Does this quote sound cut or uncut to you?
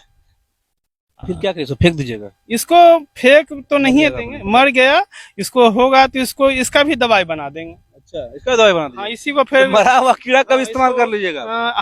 uncut